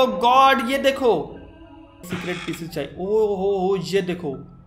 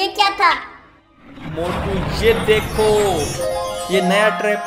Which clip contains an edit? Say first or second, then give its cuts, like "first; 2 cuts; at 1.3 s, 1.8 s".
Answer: first; 1 cut; at 2.1 s